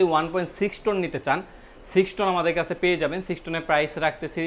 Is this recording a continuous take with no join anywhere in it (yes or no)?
yes